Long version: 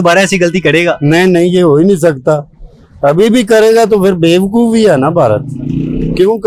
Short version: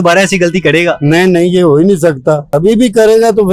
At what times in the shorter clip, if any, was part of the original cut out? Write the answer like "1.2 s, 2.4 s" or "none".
2.5 s